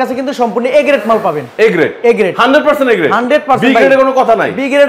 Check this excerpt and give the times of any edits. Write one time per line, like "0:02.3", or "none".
none